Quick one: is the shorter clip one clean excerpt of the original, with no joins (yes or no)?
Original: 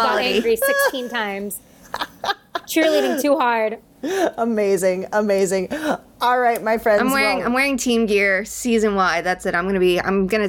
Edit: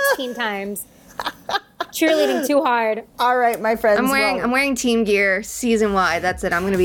no